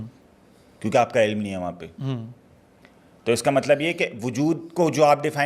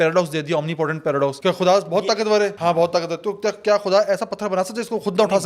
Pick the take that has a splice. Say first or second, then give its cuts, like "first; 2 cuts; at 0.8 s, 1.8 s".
second; 2 cuts; at 1.4 s, 2.6 s